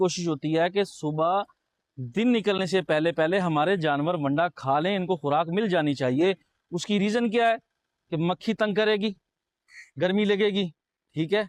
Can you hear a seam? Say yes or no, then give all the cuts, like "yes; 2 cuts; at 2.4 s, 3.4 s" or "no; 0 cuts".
no; 0 cuts